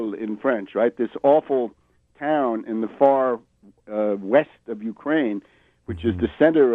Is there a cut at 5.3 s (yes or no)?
yes